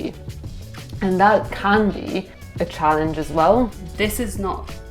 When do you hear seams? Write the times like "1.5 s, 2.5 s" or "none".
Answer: 2.4 s, 3.8 s